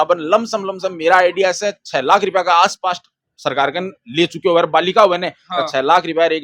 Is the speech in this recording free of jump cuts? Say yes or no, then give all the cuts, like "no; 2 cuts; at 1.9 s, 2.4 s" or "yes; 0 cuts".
yes; 0 cuts